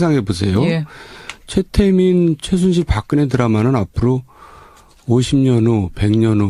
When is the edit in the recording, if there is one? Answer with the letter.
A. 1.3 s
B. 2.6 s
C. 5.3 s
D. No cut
C